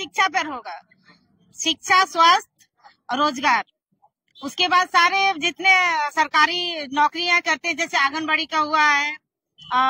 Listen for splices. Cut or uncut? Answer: uncut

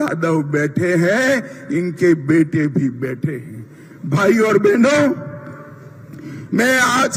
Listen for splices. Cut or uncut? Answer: uncut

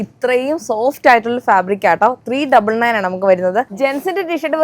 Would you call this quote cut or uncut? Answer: cut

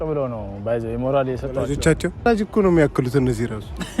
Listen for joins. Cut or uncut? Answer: cut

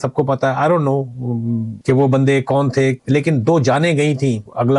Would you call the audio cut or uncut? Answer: uncut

